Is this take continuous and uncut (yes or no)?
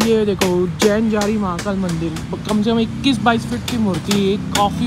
yes